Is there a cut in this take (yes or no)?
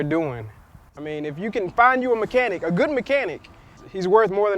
no